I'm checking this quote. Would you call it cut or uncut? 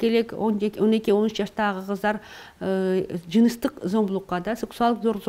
uncut